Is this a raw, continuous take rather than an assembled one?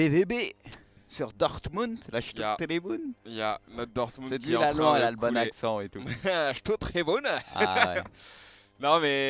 no; 1 cut; at 6.9 s

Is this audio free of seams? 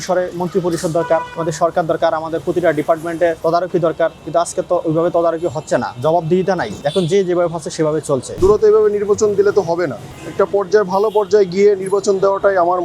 no; 5 cuts; at 1.3 s, 3.4 s, 4.2 s, 6.8 s, 8.4 s

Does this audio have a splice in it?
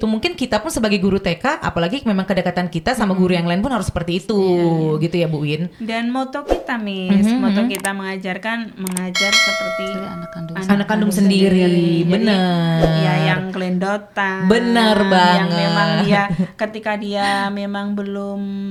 no; 0 cuts

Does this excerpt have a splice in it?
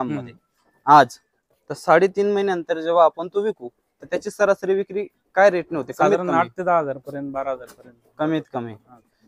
no; 0 cuts

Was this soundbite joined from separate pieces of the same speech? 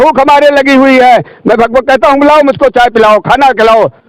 no; 0 cuts

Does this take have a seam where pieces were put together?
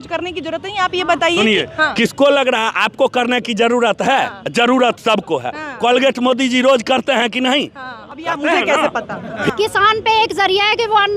yes; 1 cut; at 9.5 s

